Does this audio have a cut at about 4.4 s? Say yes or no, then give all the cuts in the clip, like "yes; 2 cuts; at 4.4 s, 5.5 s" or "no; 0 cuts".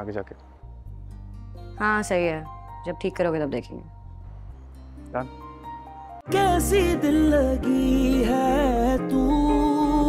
no; 1 cut; at 6.2 s